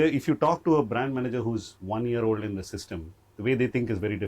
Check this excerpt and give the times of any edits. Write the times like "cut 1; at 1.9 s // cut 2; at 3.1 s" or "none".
cut 1; at 1.7 s